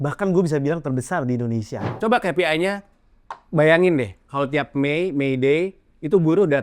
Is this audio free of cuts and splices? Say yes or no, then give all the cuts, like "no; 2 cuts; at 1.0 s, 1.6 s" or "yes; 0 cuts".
no; 1 cut; at 1.9 s